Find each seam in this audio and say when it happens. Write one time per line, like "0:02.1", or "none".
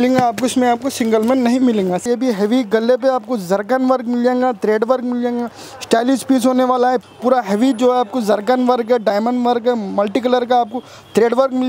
0:02.1
0:07.0